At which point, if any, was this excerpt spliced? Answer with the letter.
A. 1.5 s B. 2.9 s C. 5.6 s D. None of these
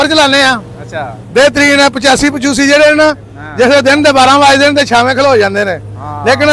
D